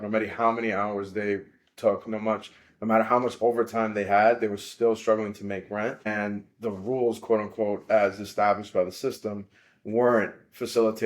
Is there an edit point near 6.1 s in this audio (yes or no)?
yes